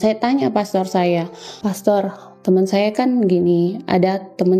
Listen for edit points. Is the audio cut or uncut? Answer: cut